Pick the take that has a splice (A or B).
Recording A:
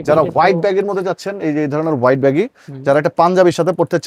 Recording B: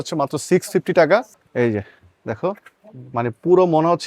B